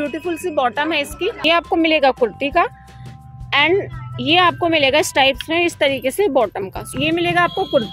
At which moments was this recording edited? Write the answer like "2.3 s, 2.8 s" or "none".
1.4 s, 6.8 s